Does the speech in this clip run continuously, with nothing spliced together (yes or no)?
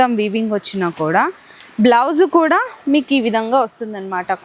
yes